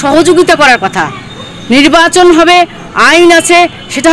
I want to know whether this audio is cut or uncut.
uncut